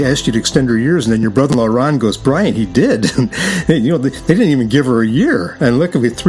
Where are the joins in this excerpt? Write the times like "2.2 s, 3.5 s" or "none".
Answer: none